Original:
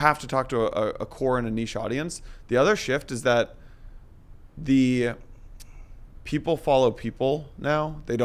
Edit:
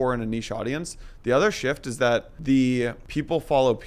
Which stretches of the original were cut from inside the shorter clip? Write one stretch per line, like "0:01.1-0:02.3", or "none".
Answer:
0:03.6-0:04.5
0:05.2-0:06.2